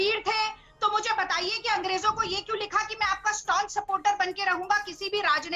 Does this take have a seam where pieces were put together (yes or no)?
no